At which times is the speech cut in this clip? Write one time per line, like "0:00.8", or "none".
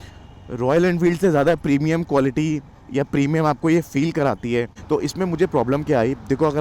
0:04.8